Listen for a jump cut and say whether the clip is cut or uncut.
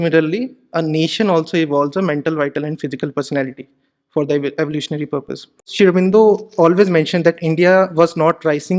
cut